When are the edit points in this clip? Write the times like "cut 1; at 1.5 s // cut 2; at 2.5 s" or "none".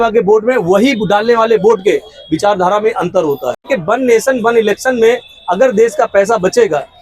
cut 1; at 3.6 s